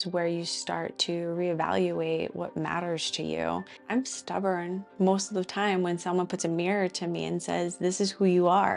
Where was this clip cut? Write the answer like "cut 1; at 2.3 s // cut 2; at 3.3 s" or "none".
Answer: cut 1; at 3.8 s // cut 2; at 4.9 s